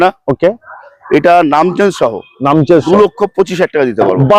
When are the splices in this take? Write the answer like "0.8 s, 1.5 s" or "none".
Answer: none